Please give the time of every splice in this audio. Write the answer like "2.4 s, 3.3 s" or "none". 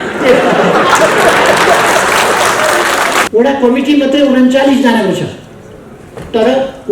3.3 s